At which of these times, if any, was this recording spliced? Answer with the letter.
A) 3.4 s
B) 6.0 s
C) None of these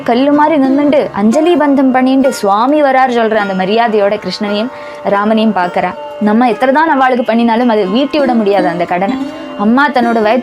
B